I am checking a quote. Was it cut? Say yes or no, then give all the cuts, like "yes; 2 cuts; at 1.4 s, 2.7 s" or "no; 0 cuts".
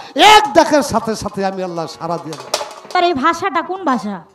yes; 1 cut; at 2.9 s